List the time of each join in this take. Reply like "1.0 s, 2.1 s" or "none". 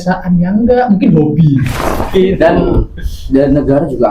2.0 s